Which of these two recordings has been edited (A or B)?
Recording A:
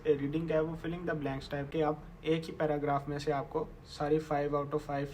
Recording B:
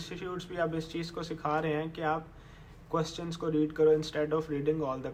A